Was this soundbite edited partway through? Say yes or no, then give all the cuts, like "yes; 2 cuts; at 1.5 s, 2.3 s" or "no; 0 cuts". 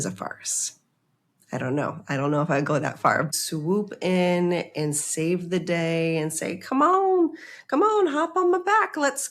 yes; 1 cut; at 3.3 s